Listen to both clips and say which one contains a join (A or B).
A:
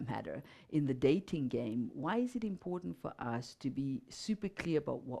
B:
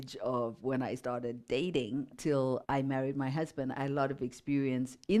B